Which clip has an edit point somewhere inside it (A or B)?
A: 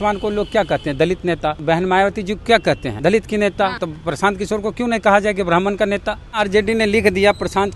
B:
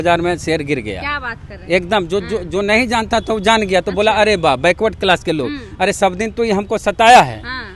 A